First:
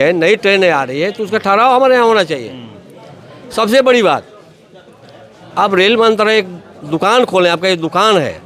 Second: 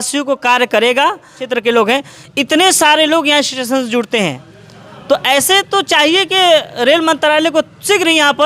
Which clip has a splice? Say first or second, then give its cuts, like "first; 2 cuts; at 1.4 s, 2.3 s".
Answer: second; 1 cut; at 1.4 s